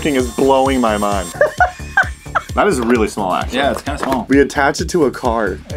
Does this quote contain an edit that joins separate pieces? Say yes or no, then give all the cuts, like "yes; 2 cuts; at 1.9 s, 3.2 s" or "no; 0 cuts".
yes; 3 cuts; at 1.3 s, 2.5 s, 4.2 s